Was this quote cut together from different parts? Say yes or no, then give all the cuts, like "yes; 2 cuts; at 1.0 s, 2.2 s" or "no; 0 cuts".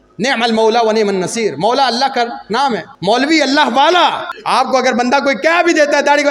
yes; 2 cuts; at 2.9 s, 4.3 s